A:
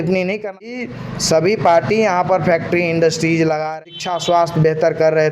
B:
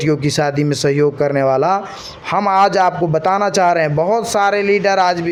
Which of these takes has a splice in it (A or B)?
A